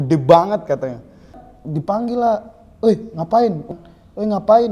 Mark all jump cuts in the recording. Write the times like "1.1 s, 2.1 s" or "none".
1.5 s, 3.7 s